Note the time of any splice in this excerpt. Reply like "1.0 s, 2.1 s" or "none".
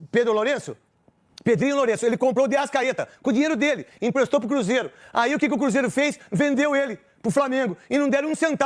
none